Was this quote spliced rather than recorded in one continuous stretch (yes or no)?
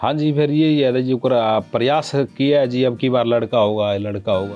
no